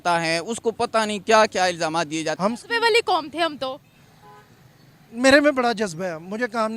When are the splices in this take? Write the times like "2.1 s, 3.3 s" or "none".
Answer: 2.4 s